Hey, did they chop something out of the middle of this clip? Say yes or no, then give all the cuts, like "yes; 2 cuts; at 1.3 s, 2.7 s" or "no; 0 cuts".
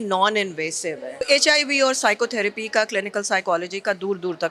yes; 1 cut; at 1.3 s